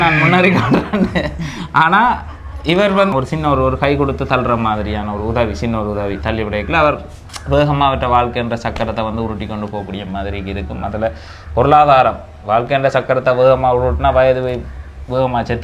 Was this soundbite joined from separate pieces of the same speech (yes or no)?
yes